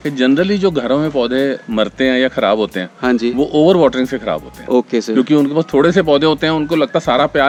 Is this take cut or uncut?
uncut